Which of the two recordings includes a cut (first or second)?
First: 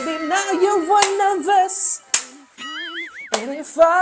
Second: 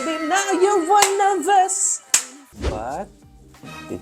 second